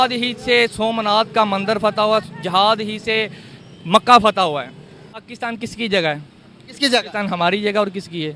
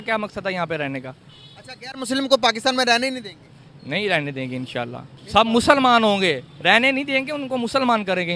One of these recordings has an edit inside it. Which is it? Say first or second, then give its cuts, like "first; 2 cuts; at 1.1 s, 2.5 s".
first; 1 cut; at 5.2 s